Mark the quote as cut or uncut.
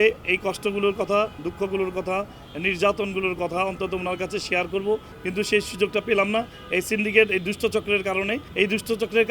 cut